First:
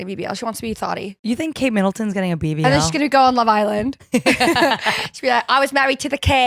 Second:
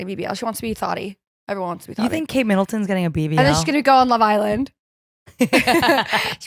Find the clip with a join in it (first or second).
first